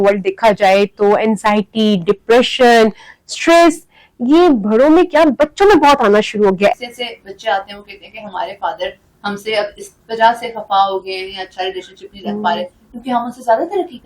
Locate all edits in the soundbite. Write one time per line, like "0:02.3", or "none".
0:06.7